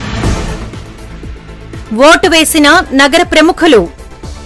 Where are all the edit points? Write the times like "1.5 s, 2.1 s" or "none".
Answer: 1.8 s

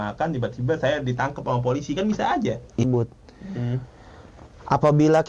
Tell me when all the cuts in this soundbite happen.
2.8 s

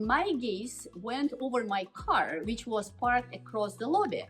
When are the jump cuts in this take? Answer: none

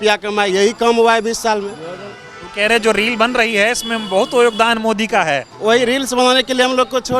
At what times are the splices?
none

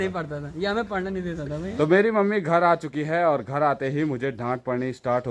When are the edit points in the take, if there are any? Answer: 1.7 s

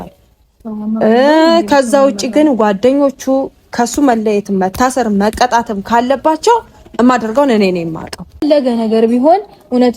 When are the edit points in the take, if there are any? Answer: 8.4 s

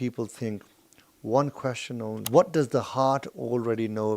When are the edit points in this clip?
2.2 s

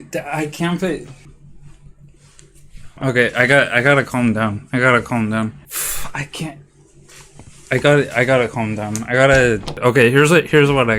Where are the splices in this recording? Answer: 9.8 s

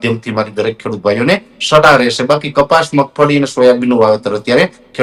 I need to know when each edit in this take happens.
none

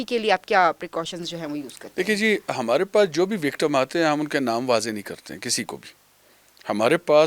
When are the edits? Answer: none

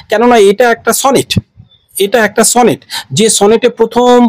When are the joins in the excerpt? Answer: none

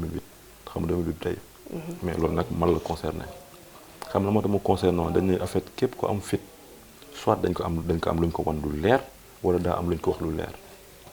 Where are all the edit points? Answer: none

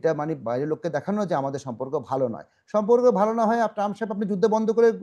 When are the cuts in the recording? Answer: none

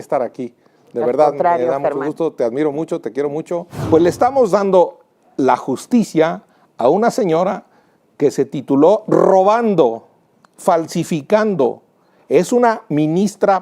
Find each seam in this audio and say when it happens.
3.8 s

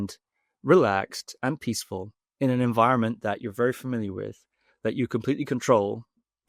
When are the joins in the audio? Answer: none

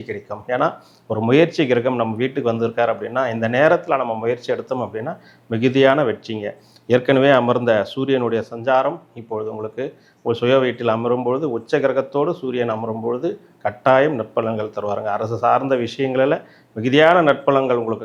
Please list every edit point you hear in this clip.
none

